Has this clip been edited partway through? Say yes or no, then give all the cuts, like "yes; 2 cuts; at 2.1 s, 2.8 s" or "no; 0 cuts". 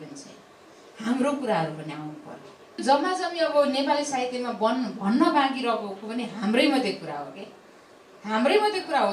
yes; 1 cut; at 2.8 s